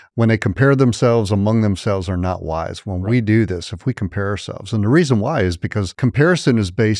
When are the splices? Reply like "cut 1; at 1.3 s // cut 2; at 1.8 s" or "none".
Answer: cut 1; at 5.9 s